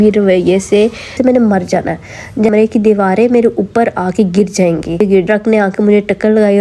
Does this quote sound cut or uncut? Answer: cut